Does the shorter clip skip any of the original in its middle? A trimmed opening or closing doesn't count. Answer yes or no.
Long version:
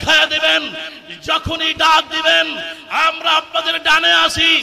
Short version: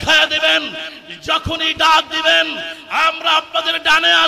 no